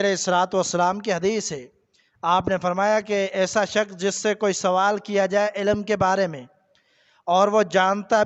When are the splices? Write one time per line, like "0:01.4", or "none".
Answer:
none